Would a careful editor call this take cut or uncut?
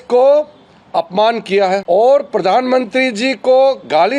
cut